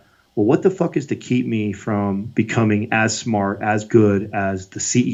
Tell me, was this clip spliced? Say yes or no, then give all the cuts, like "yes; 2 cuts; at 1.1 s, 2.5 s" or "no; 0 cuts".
no; 0 cuts